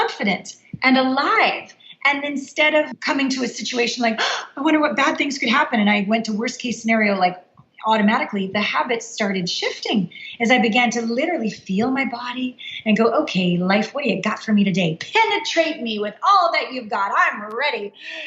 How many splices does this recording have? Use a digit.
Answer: 1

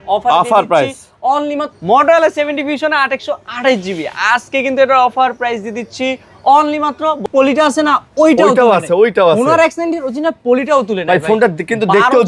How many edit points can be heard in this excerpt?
2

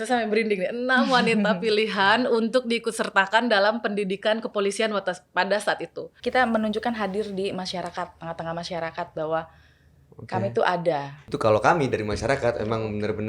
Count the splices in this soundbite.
2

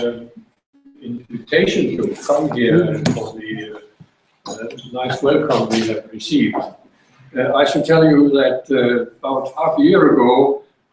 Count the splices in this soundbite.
0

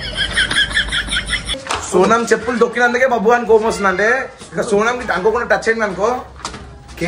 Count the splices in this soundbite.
1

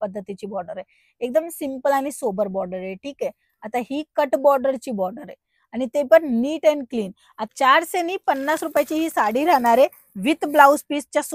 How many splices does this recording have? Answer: 1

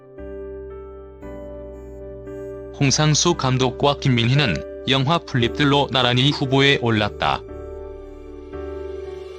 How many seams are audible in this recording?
2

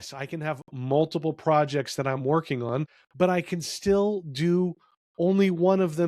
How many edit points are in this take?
1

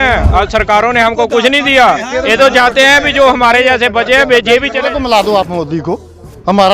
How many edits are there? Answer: 1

